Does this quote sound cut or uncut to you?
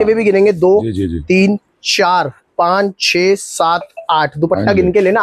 uncut